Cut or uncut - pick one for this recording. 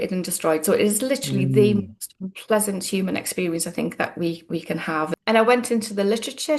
cut